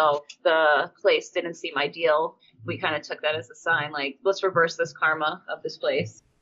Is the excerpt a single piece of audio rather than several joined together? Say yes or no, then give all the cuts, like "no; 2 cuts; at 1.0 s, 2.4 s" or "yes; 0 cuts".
no; 2 cuts; at 0.9 s, 2.5 s